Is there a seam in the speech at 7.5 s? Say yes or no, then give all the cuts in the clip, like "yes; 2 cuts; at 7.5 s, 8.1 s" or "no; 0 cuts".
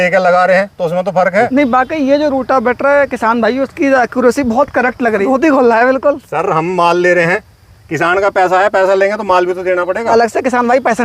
no; 3 cuts; at 1.5 s, 5.2 s, 10.1 s